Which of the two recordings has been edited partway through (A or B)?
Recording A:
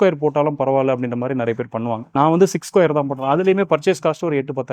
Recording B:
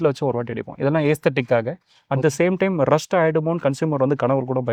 A